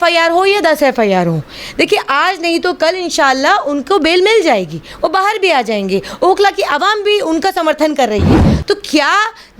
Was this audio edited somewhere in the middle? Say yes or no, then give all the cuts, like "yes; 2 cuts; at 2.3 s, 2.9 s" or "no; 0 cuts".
yes; 1 cut; at 8.5 s